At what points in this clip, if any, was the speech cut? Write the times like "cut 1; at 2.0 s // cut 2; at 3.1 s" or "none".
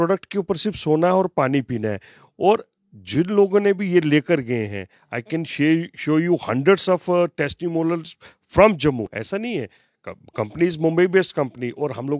none